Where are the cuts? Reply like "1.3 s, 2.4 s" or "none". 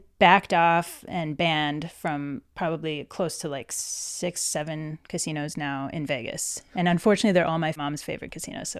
7.8 s